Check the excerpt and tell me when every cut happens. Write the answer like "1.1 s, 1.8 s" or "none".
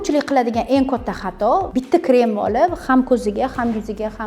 1.7 s